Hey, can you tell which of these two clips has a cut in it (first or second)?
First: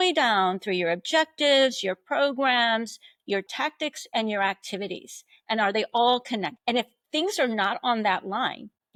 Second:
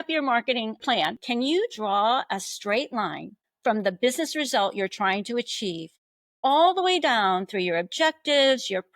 second